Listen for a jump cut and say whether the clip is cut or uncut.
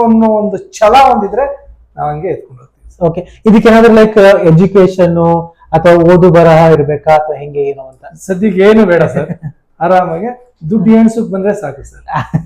uncut